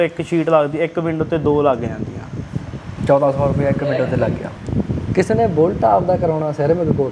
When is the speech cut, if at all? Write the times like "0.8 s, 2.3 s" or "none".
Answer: 4.5 s